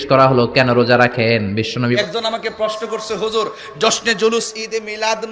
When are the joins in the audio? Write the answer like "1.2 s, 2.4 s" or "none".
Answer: 2.0 s